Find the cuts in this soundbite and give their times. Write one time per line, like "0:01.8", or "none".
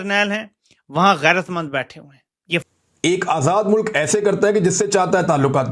0:02.6